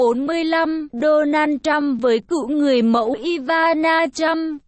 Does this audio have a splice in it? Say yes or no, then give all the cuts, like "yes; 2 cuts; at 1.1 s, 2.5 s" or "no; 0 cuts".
no; 0 cuts